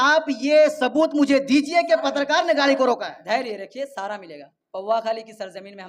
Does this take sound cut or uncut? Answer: uncut